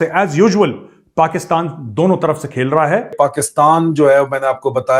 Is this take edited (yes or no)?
yes